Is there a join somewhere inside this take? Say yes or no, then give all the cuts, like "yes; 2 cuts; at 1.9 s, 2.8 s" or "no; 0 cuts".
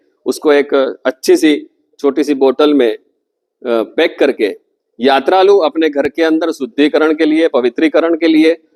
no; 0 cuts